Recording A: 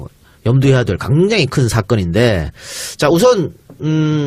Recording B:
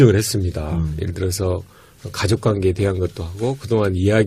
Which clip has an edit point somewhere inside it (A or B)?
B